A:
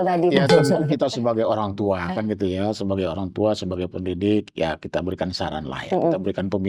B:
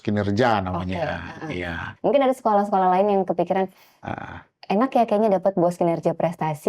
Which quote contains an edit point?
B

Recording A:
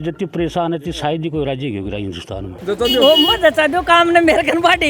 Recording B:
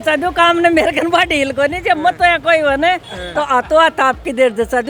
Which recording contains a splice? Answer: A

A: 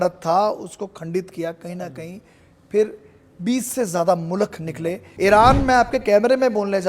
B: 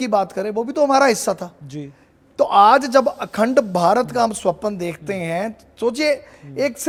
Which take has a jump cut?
A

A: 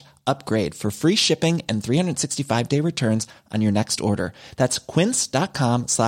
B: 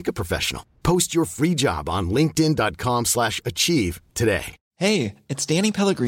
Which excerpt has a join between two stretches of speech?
B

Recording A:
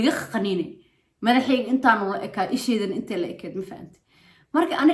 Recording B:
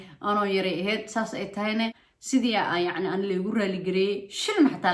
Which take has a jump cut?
B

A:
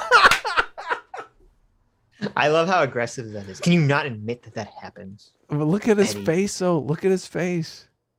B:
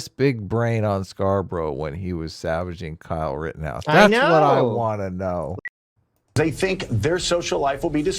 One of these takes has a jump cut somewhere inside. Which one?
B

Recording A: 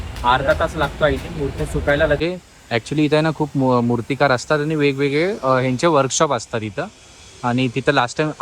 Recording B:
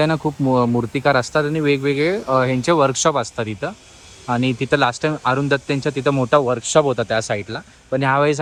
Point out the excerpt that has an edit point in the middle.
A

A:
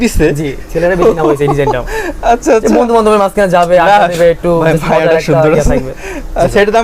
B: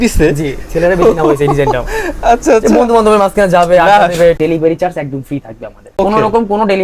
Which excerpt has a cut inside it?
B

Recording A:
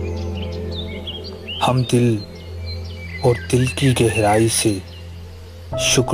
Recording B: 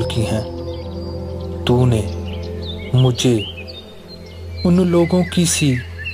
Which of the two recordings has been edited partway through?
A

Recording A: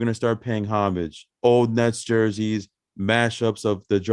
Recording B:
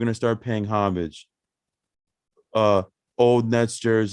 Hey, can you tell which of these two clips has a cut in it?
A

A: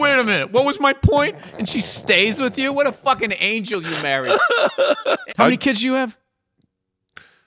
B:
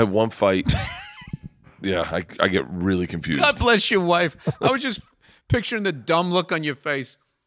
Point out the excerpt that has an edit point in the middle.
A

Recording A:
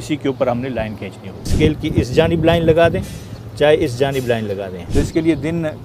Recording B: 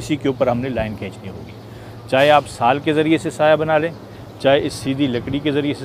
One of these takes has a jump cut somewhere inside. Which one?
A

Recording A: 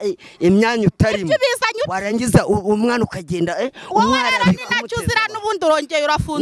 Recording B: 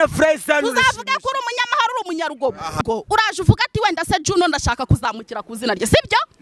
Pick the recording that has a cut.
B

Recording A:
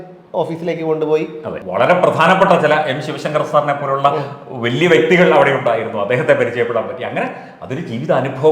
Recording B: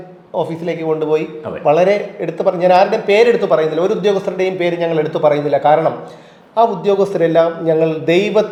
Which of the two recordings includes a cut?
A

